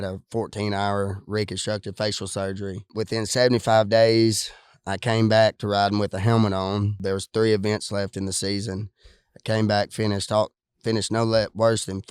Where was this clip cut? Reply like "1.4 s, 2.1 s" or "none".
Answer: 2.9 s, 7.0 s